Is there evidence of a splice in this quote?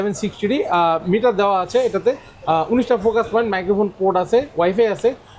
no; 0 cuts

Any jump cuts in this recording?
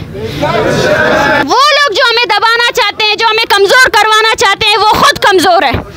yes; 1 cut; at 1.4 s

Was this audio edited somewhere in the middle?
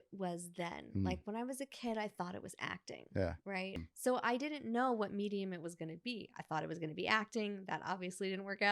yes; 1 cut; at 3.9 s

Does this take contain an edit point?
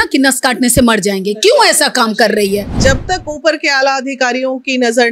yes; 1 cut; at 2.7 s

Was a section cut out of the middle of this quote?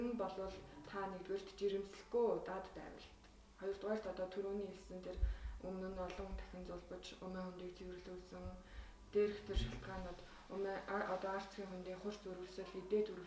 no; 0 cuts

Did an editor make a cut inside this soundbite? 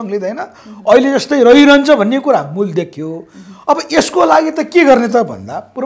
no; 0 cuts

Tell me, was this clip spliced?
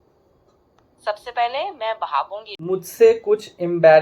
yes; 1 cut; at 2.5 s

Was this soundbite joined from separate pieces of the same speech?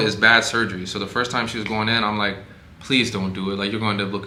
no; 0 cuts

